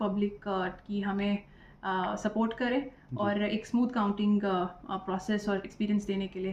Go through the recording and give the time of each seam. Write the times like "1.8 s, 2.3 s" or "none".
none